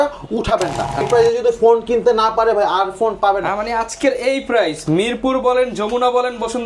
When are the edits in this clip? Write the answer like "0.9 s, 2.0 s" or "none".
1.0 s